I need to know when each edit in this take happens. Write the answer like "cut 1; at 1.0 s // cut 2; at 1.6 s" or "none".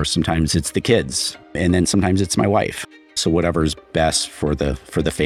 cut 1; at 1.5 s // cut 2; at 3.1 s